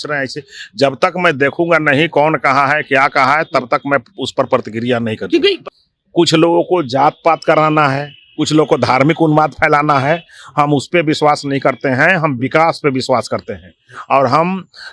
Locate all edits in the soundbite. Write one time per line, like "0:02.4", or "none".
0:05.7

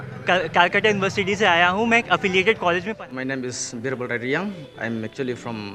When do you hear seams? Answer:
0:02.9

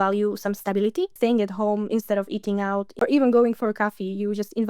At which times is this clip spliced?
0:01.1
0:02.9

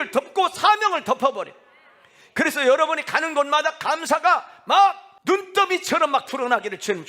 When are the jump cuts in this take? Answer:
0:05.1

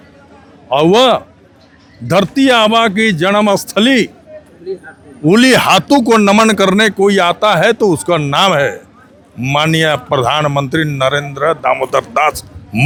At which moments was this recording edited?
none

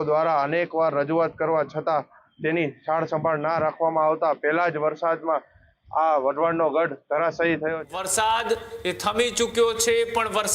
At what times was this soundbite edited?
0:07.8

